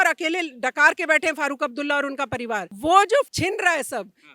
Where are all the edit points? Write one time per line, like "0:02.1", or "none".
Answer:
0:02.7
0:03.3